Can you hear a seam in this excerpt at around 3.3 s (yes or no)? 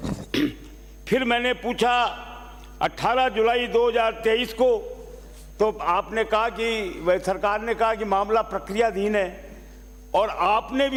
no